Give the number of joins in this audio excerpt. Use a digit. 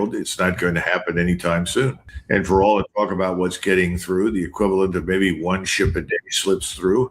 1